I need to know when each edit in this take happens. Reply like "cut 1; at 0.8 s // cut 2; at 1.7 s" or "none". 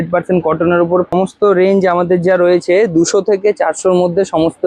cut 1; at 1.1 s